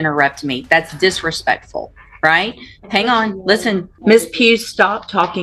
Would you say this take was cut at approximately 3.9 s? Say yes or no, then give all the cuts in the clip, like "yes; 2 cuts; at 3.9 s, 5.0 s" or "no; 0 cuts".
yes; 1 cut; at 3.9 s